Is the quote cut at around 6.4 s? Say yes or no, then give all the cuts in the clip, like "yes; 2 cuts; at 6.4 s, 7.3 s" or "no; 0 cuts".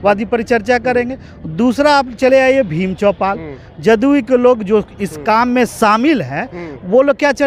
no; 0 cuts